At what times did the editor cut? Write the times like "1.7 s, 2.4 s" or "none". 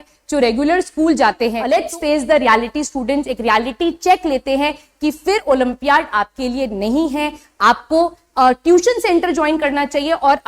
1.6 s

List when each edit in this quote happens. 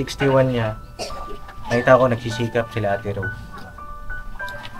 none

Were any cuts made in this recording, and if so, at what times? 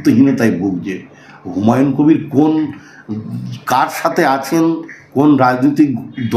none

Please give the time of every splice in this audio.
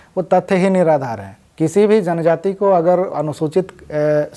1.4 s

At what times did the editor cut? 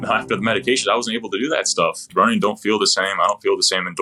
2.0 s

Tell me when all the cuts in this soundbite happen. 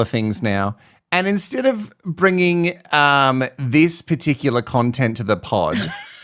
none

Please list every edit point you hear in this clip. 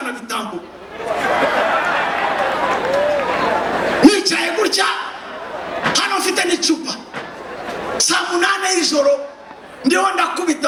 none

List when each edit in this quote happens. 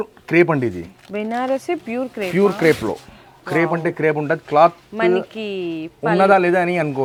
none

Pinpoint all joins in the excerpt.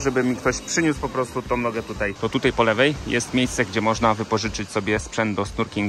2.1 s

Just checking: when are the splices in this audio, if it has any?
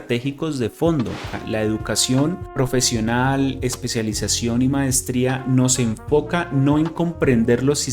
1.4 s

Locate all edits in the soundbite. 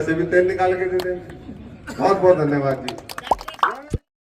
none

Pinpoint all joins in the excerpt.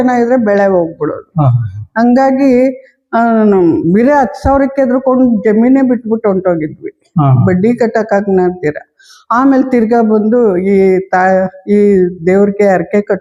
none

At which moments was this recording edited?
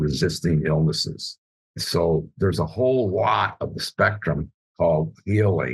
none

